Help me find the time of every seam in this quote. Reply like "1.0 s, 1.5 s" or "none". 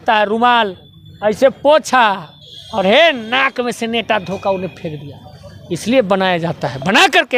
none

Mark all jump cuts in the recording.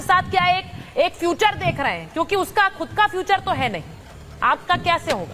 none

